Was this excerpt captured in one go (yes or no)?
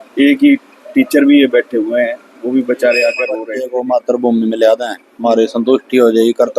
no